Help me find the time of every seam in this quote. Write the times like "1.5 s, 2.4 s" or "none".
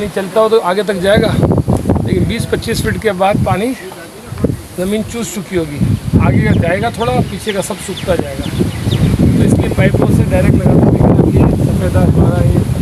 none

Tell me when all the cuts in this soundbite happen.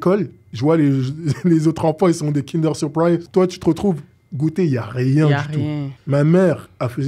3.3 s, 5.9 s

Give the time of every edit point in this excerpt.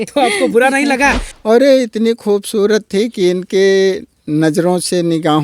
1.3 s

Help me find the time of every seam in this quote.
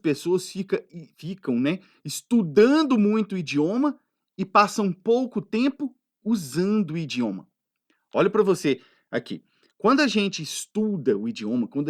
none

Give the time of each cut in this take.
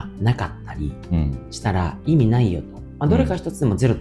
none

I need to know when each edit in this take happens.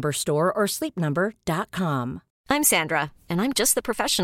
2.3 s

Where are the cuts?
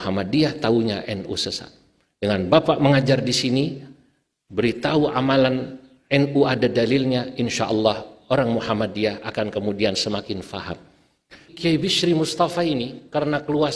11.5 s

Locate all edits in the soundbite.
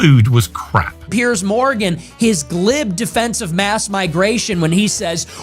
1.0 s

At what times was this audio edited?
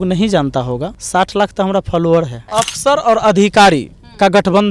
1.0 s, 2.4 s

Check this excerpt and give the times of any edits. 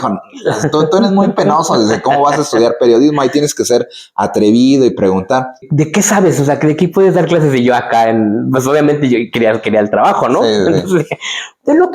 5.6 s

